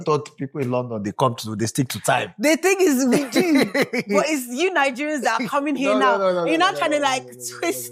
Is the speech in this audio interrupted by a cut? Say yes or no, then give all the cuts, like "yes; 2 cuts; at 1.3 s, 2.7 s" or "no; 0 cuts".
no; 0 cuts